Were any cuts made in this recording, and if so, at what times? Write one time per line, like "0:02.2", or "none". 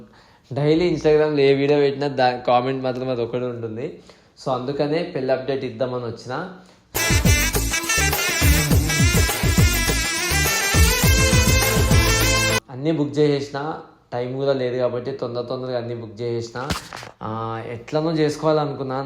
0:12.6